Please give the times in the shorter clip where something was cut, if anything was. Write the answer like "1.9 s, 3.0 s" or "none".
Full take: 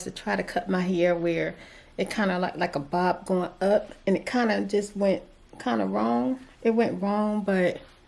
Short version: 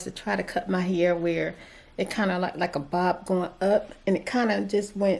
none